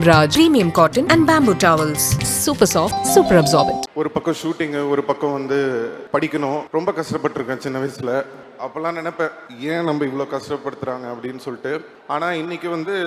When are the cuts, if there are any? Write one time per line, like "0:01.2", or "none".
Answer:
0:03.8
0:06.0
0:06.7
0:08.4
0:09.5
0:11.9